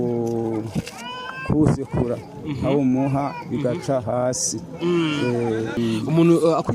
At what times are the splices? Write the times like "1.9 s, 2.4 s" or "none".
5.8 s